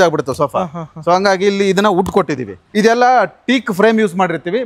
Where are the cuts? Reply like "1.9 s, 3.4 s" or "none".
2.7 s